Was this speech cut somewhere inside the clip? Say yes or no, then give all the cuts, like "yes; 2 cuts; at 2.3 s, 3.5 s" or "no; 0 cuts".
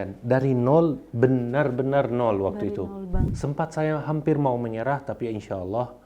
yes; 1 cut; at 3.2 s